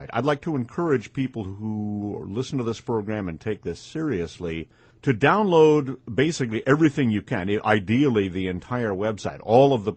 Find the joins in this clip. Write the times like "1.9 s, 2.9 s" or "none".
none